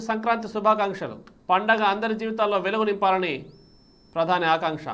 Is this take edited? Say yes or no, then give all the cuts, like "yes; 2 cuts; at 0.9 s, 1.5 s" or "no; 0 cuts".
no; 0 cuts